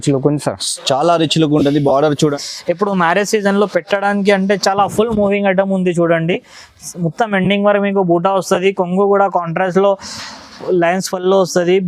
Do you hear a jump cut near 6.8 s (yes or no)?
no